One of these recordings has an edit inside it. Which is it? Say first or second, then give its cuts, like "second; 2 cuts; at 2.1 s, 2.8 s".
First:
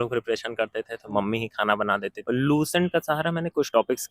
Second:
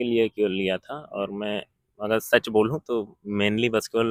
first; 1 cut; at 2.1 s